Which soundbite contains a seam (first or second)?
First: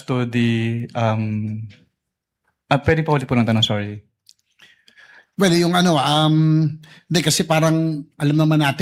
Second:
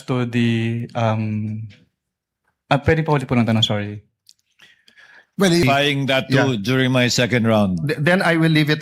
second